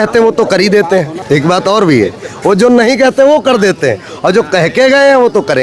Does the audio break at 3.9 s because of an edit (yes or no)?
no